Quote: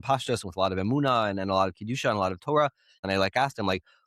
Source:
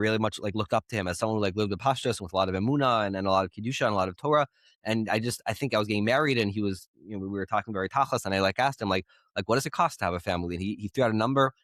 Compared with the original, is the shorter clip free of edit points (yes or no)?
no